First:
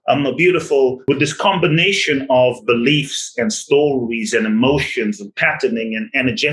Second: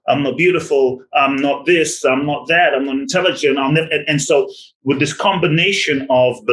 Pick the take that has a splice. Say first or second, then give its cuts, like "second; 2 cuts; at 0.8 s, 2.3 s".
first; 1 cut; at 1.0 s